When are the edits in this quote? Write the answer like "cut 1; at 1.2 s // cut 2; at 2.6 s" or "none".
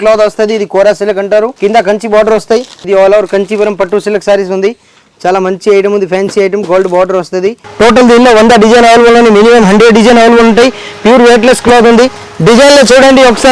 cut 1; at 1.5 s // cut 2; at 2.9 s // cut 3; at 7.6 s